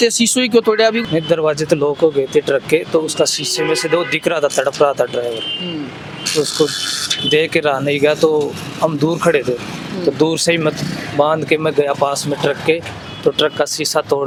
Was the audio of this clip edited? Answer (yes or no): no